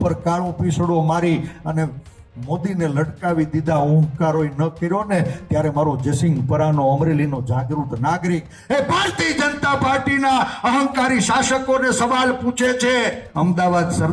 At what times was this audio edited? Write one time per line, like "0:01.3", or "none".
0:13.2